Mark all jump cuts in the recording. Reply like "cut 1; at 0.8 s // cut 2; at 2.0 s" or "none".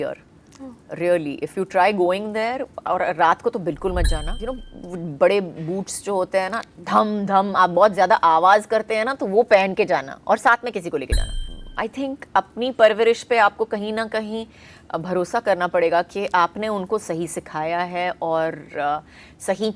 cut 1; at 4.4 s // cut 2; at 11.4 s

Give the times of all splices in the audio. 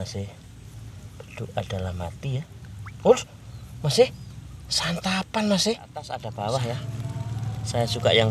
cut 1; at 6.2 s

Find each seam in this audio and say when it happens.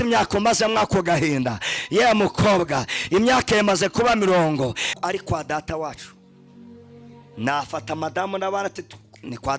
cut 1; at 4.9 s

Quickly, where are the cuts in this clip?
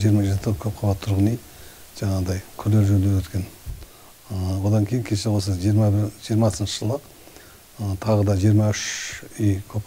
none

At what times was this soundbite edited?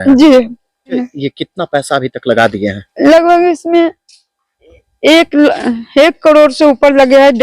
cut 1; at 1.0 s

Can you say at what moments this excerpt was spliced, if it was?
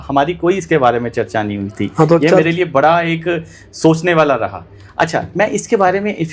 none

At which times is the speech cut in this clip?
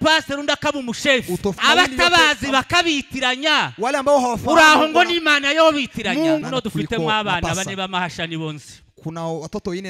cut 1; at 1.6 s // cut 2; at 6.4 s

